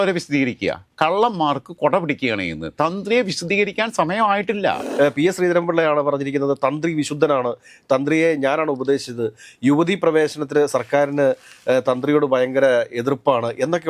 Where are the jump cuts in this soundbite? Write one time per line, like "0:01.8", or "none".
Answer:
0:04.9